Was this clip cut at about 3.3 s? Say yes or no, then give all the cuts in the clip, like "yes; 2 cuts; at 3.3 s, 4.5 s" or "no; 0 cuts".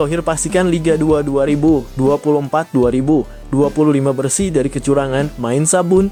no; 0 cuts